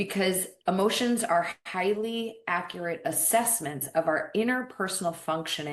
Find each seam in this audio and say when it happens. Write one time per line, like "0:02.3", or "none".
none